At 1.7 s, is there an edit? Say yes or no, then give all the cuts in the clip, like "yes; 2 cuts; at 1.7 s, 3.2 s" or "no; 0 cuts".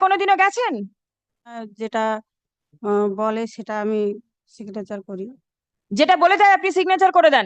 yes; 1 cut; at 1.7 s